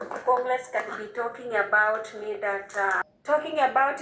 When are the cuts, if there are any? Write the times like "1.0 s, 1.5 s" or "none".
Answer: 3.0 s